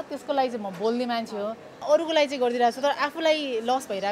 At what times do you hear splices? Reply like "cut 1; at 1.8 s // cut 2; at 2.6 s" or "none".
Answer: cut 1; at 1.8 s